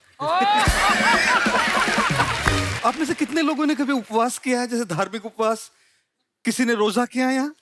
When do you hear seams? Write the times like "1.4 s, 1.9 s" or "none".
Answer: 2.7 s